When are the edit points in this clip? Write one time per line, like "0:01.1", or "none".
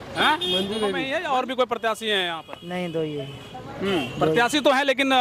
0:01.0